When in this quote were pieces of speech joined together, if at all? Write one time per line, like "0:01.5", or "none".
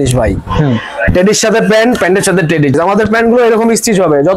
0:02.7